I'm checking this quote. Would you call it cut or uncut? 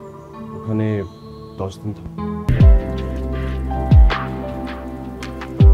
cut